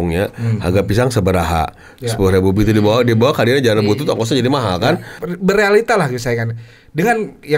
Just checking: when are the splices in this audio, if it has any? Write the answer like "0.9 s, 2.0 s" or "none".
5.1 s